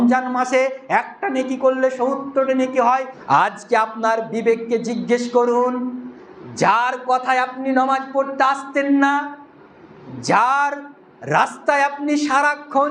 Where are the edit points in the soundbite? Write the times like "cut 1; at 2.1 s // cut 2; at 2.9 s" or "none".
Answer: cut 1; at 3.1 s